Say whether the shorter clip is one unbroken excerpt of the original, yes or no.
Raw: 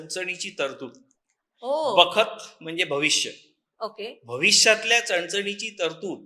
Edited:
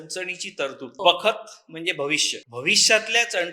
no